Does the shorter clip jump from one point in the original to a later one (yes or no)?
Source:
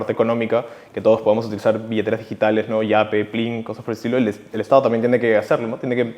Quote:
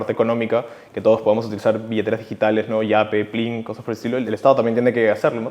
yes